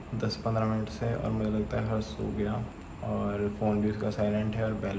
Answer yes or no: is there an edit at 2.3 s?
no